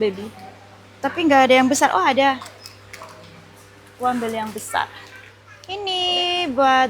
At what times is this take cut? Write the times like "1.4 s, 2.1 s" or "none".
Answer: 5.7 s